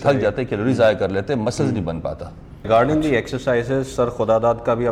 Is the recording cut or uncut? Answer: cut